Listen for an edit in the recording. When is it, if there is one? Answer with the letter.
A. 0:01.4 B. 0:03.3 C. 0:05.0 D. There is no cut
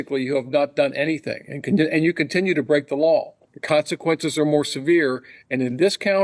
B